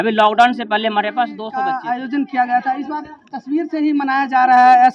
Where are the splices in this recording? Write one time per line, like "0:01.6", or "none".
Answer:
0:01.4